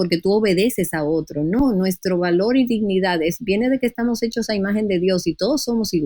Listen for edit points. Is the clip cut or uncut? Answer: uncut